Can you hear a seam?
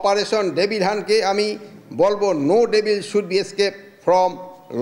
no; 0 cuts

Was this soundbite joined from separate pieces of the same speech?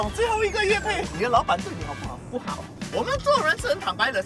yes; 1 cut; at 1.1 s

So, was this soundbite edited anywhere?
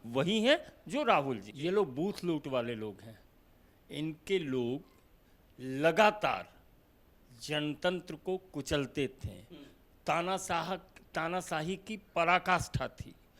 yes; 1 cut; at 1.5 s

